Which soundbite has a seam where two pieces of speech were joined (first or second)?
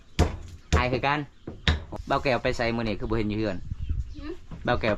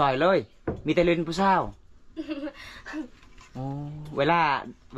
first